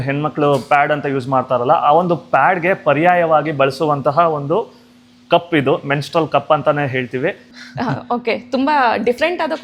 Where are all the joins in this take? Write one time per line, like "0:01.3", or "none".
0:07.4